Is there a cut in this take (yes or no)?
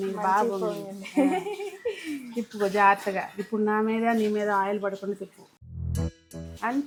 no